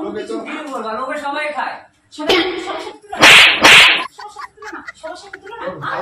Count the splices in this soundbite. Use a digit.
0